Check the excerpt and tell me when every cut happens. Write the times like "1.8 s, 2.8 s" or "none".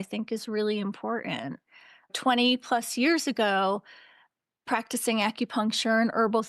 2.1 s